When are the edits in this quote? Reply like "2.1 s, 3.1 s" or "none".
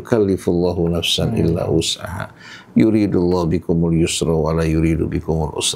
none